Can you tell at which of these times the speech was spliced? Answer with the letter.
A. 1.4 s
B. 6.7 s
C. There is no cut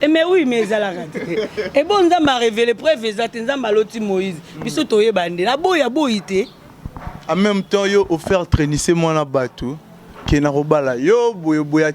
C